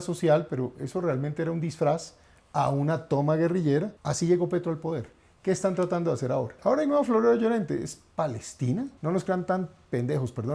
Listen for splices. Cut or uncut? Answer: cut